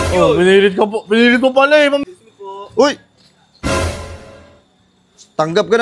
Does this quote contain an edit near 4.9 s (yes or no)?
no